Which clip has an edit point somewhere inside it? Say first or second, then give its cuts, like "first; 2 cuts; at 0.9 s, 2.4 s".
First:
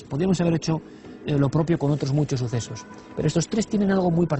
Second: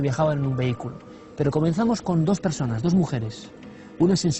first; 1 cut; at 3.2 s